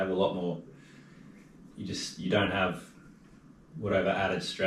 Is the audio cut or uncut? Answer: uncut